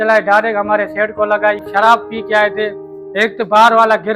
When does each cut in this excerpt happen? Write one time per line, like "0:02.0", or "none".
0:01.6